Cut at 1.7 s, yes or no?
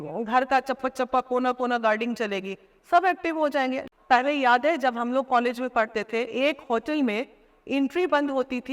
no